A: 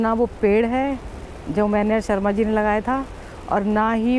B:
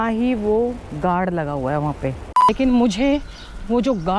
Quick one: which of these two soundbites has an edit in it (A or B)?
B